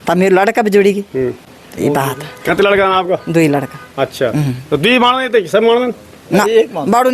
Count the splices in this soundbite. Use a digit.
0